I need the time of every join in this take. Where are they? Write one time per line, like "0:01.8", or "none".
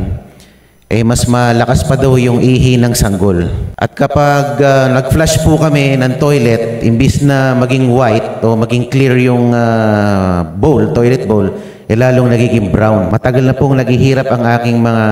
0:03.6
0:13.1

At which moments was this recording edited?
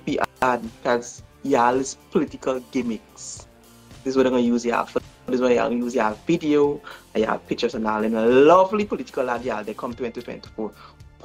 none

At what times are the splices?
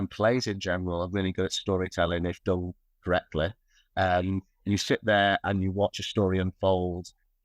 none

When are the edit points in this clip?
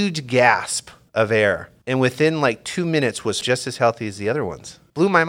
0:03.4

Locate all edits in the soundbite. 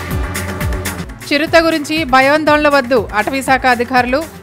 0:01.0

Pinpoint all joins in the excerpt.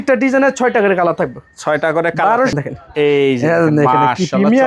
0:02.5

